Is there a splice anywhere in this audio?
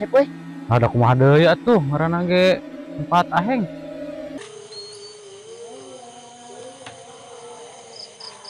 yes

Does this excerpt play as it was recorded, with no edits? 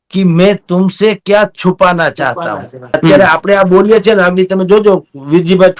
no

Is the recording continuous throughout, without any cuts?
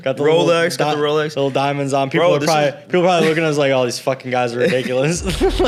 yes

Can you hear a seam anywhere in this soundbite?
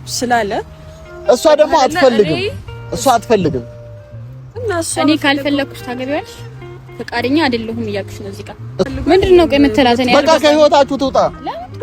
yes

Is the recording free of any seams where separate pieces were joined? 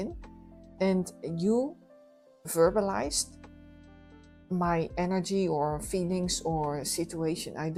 yes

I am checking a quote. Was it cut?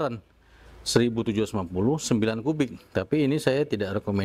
no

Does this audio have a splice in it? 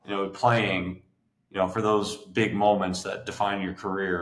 no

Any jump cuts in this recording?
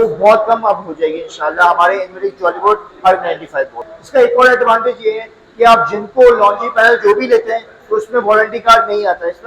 yes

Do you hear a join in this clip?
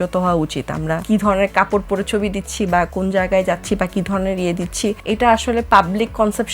yes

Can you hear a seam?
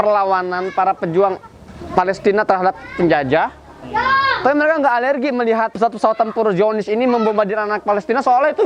yes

